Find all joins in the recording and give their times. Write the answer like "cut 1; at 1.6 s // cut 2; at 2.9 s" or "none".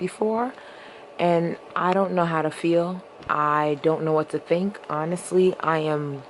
none